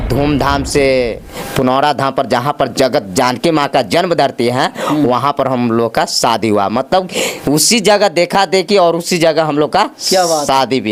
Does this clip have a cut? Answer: no; 0 cuts

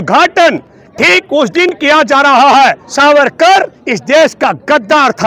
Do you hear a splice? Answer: yes; 1 cut; at 2.8 s

